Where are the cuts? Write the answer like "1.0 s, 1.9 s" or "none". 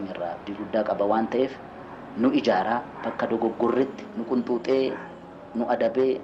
4.1 s